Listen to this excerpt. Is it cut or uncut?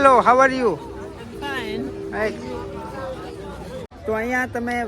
cut